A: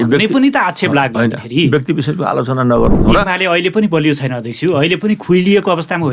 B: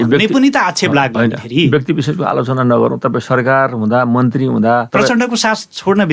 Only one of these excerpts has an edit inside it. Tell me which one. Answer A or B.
A